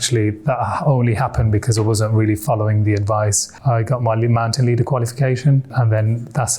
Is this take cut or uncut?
cut